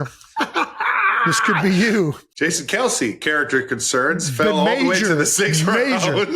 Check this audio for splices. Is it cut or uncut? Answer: cut